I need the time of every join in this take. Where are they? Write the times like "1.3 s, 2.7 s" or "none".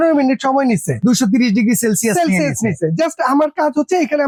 none